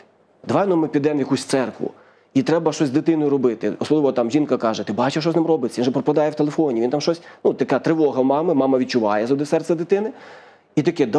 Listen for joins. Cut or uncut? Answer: uncut